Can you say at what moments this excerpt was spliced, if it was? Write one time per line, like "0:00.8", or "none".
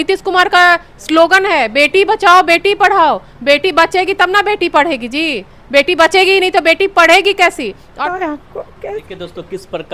0:07.9